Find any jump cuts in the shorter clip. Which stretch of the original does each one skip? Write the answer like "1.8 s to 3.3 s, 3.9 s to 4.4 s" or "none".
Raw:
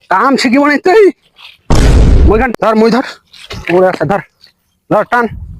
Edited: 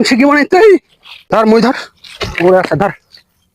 1.6 s to 2.5 s

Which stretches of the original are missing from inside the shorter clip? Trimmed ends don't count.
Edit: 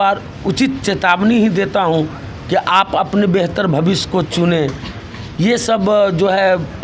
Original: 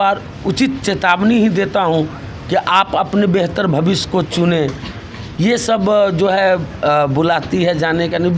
none

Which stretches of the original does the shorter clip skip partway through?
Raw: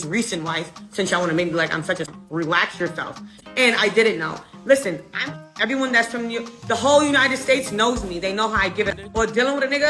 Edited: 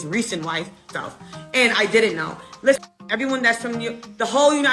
0.9 s to 2.9 s, 4.8 s to 5.3 s

